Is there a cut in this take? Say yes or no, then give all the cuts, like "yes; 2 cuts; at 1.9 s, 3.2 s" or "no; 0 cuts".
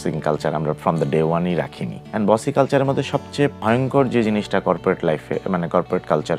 no; 0 cuts